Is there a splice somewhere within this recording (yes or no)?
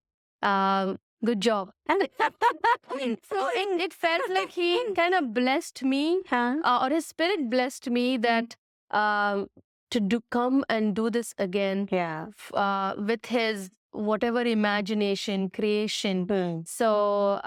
no